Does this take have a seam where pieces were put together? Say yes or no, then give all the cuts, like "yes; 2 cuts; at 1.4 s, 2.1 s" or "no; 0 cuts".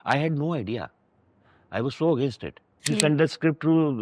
yes; 1 cut; at 2.9 s